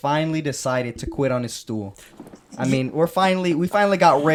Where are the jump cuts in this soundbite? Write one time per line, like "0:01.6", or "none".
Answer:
none